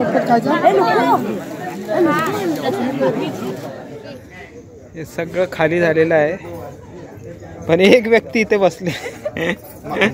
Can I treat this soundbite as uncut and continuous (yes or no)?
no